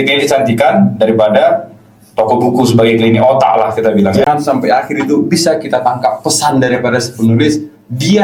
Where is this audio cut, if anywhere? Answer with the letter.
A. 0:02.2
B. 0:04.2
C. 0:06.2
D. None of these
B